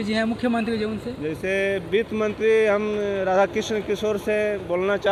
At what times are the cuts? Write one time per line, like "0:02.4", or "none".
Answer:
none